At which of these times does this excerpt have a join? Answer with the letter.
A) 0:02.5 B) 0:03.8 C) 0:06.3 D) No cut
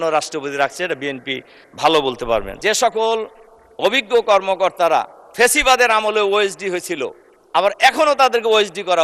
A